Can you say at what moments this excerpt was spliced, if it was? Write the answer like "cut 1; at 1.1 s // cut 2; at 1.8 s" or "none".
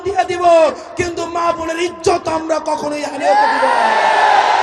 none